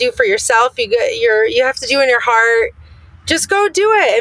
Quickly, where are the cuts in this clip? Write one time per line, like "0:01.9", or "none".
none